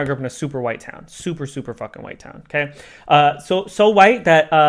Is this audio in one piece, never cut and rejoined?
yes; 0 cuts

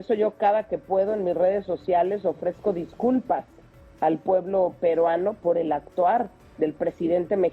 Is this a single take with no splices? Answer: yes; 0 cuts

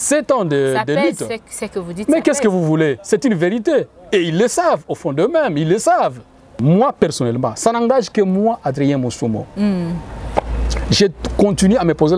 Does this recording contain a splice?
yes; 1 cut; at 6.6 s

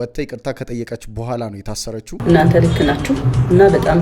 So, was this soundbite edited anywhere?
yes; 1 cut; at 2.1 s

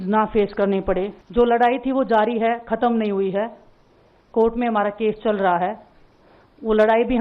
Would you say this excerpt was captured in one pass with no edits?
no; 1 cut; at 1.2 s

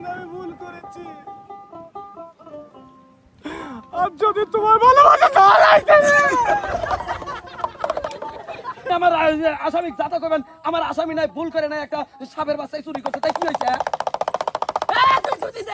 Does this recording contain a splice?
yes; 1 cut; at 8.8 s

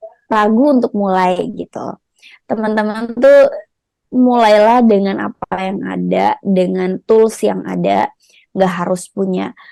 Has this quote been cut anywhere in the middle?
no; 0 cuts

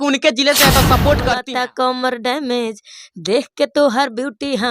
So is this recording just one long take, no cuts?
no; 1 cut; at 1.4 s

